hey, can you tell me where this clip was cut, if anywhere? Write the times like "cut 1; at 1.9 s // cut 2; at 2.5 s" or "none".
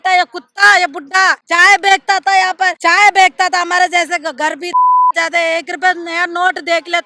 cut 1; at 1.4 s // cut 2; at 2.8 s

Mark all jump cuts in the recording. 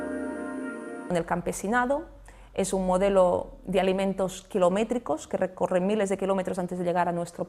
none

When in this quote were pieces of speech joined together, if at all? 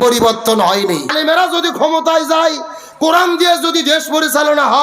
cut 1; at 1.1 s

